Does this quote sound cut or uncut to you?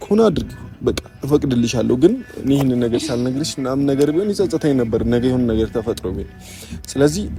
uncut